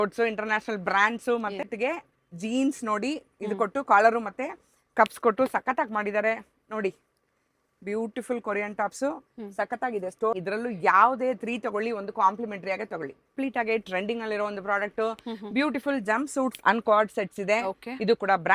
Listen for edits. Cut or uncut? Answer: cut